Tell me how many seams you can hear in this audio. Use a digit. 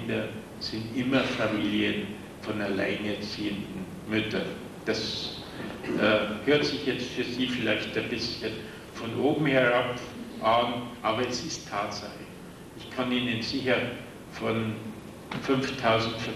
1